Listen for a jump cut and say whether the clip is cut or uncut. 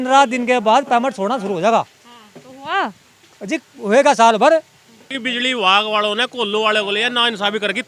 cut